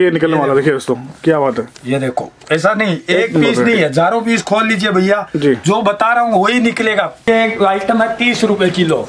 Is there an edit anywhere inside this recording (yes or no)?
yes